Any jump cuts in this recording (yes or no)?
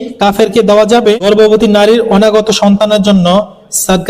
yes